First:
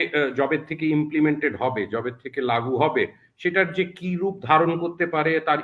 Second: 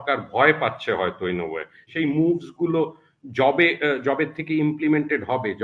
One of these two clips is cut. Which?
second; 1 cut; at 1.8 s

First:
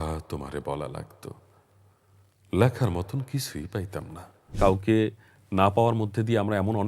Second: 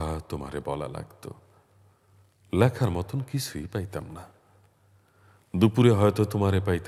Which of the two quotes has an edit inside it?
first; 1 cut; at 4.6 s

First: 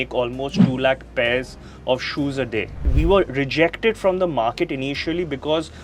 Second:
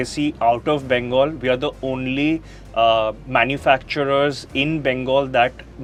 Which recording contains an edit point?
first; 1 cut; at 2.9 s

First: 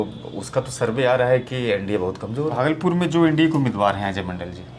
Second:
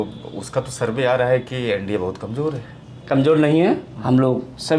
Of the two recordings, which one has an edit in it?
first; 1 cut; at 2.5 s

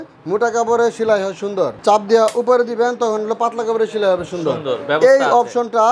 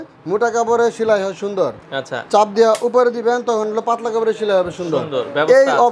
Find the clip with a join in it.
first; 1 cut; at 1.8 s

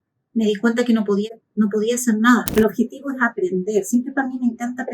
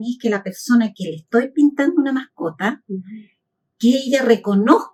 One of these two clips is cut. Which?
first; 1 cut; at 2.5 s

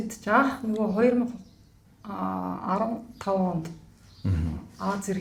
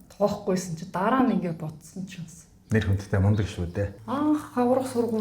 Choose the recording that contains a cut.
second; 1 cut; at 3.9 s

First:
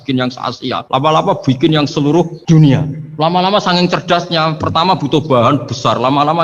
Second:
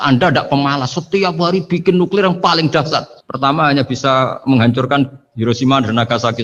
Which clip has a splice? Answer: first; 3 cuts; at 0.8 s, 2.4 s, 3.0 s

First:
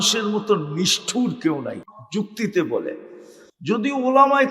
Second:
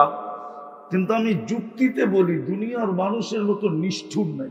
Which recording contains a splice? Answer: first; 1 cut; at 2.0 s

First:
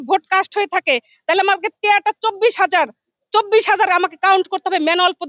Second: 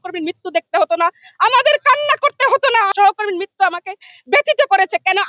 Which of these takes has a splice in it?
second; 1 cut; at 2.9 s

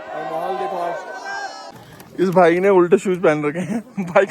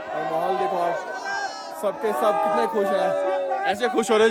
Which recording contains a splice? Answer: first; 1 cut; at 1.6 s

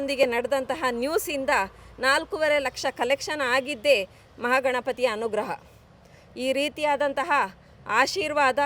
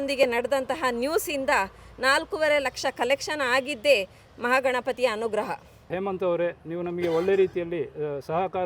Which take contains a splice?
second; 1 cut; at 5.8 s

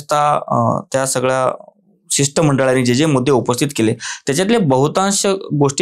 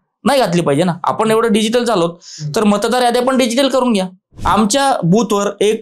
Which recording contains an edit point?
second; 1 cut; at 4.3 s

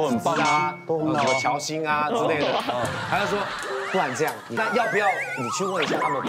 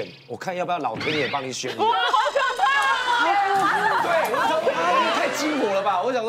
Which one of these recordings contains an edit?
first; 1 cut; at 4.6 s

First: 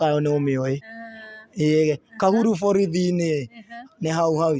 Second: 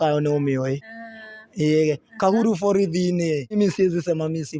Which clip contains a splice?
second; 1 cut; at 3.5 s

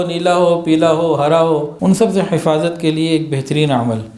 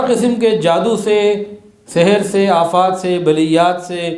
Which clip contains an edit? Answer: first; 1 cut; at 1.7 s

